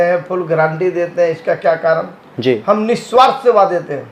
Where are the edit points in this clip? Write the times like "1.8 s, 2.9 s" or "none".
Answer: none